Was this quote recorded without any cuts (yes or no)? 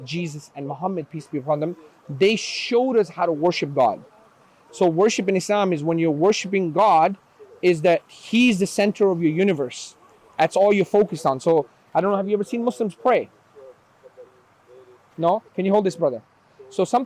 yes